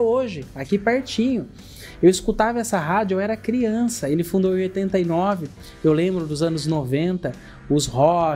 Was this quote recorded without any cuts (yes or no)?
yes